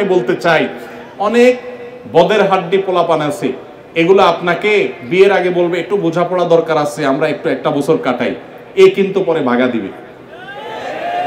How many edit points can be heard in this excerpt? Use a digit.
0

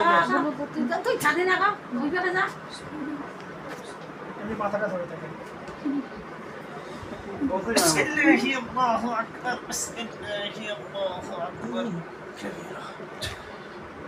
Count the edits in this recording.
0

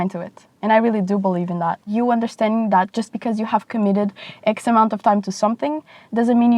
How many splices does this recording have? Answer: 1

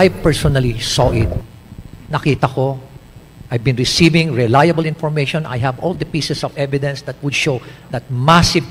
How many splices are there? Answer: 0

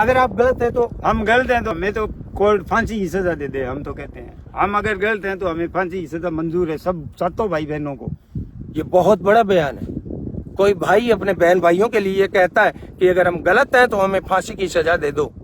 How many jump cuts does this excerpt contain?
1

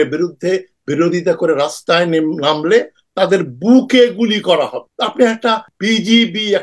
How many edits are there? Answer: 2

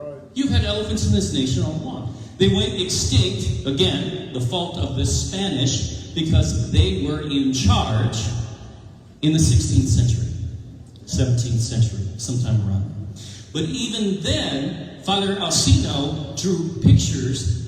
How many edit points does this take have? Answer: 0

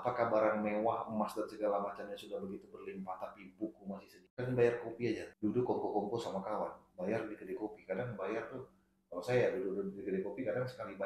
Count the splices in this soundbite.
2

